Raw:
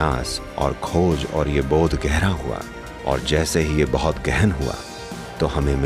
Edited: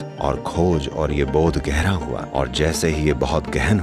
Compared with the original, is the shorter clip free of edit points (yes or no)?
no